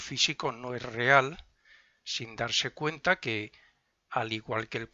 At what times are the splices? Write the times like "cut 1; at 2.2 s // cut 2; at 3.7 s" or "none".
cut 1; at 2.6 s